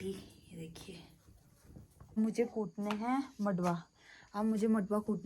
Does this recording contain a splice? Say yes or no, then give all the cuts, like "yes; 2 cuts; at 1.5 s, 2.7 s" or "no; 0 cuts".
yes; 1 cut; at 2.2 s